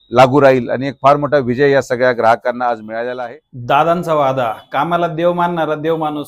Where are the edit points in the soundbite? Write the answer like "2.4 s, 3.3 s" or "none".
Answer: 3.1 s